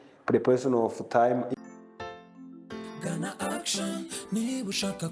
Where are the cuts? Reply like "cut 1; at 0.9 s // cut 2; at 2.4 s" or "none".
cut 1; at 1.5 s